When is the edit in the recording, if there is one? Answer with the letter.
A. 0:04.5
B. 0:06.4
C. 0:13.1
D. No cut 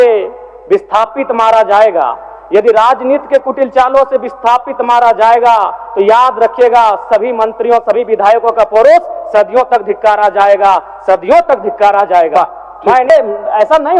C